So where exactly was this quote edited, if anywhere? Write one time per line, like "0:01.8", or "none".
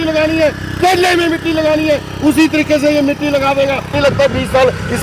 0:04.0